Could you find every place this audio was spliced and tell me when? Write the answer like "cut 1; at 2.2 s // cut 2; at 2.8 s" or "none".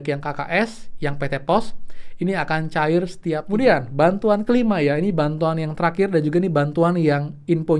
cut 1; at 3.4 s

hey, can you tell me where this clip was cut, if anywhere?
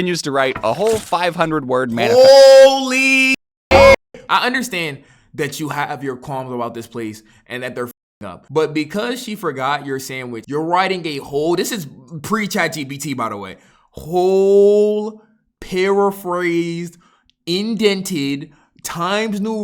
cut 1; at 4.0 s

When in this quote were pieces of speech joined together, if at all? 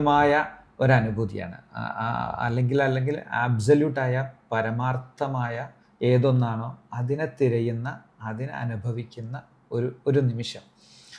none

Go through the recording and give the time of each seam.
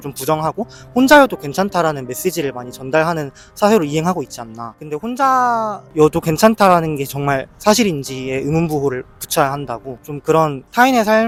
none

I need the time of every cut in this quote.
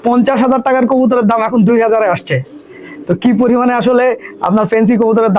none

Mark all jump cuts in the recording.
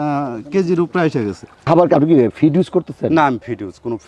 cut 1; at 1.6 s

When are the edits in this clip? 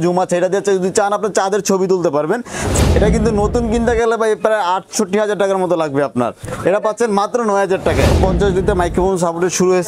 cut 1; at 2.7 s // cut 2; at 8.1 s

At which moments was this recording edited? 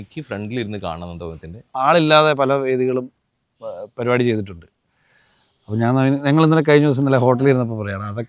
cut 1; at 1.7 s

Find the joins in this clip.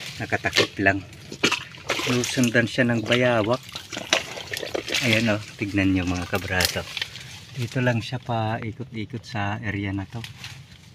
none

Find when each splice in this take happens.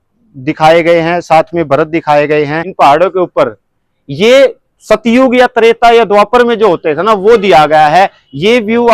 cut 1; at 2.6 s

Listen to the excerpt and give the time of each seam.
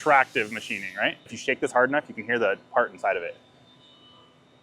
cut 1; at 1.3 s

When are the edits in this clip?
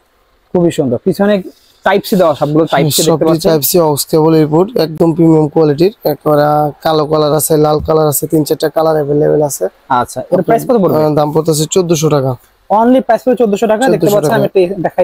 none

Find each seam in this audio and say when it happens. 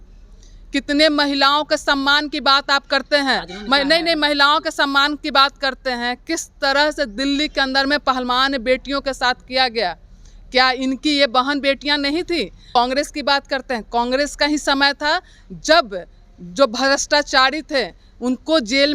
cut 1; at 12.7 s

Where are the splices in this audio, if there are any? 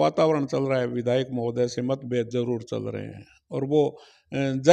none

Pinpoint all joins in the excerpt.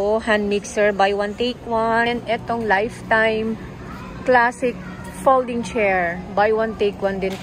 cut 1; at 2.1 s

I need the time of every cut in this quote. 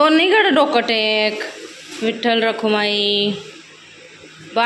none

